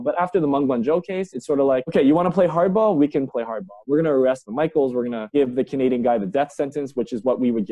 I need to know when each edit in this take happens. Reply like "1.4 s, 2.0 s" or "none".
none

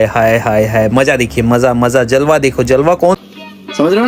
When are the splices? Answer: none

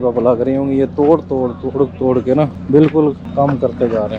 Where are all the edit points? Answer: 2.6 s, 3.2 s

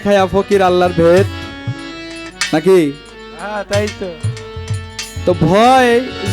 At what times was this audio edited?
none

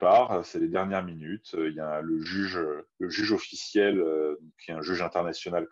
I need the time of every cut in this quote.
2.9 s

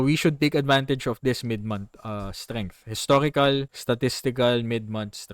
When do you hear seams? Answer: 3.7 s

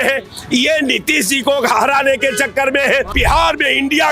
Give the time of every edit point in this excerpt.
3.1 s

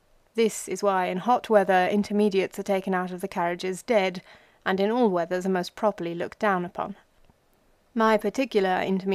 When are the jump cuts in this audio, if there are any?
3.2 s

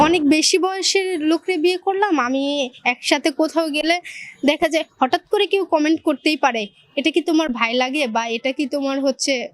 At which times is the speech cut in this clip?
none

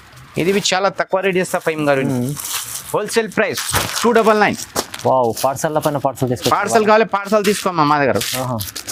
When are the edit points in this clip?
none

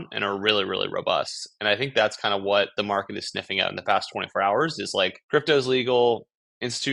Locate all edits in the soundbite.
5.2 s

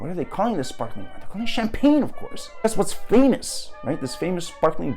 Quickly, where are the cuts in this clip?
2.6 s

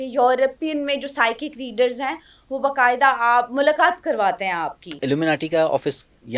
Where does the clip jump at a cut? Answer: 5.0 s

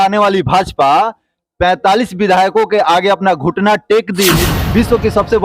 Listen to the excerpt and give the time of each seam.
4.5 s

